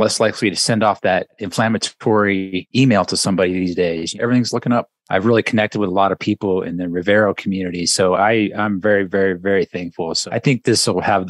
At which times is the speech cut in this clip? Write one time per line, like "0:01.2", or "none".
0:01.4
0:02.6
0:04.1
0:05.0
0:10.1